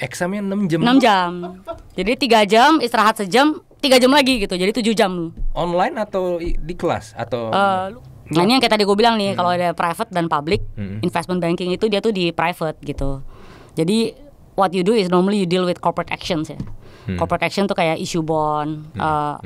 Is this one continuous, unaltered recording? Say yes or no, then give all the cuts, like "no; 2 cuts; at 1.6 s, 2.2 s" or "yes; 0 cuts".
no; 1 cut; at 7.8 s